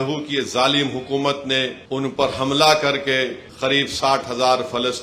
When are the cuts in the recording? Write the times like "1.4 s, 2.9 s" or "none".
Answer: 1.8 s, 3.4 s